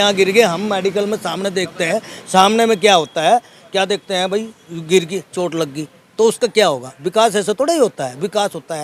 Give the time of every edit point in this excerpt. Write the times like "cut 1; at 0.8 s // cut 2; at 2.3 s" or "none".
none